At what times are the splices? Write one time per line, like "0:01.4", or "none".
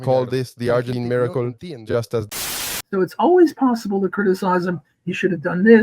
0:00.9
0:02.3